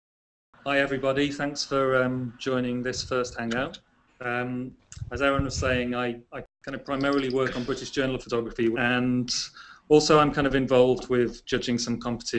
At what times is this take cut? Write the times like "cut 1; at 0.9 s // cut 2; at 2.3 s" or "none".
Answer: cut 1; at 5.9 s